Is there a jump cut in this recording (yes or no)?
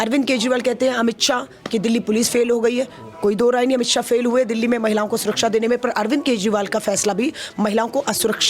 no